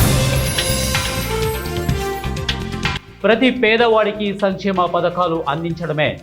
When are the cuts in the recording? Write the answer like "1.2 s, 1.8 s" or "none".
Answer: 1.6 s